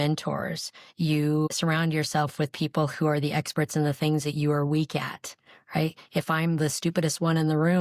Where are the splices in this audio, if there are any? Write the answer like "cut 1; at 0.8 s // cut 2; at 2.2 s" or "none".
cut 1; at 1.5 s